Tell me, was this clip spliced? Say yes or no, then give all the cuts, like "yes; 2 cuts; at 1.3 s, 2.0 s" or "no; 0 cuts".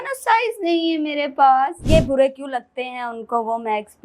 yes; 1 cut; at 1.9 s